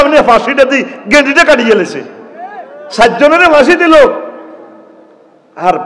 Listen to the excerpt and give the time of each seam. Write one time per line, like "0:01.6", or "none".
none